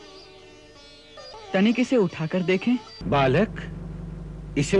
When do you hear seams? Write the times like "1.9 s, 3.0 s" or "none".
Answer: 1.3 s, 2.9 s